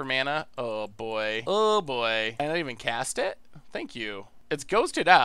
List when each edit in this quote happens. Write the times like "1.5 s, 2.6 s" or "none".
1.4 s, 2.4 s, 4.3 s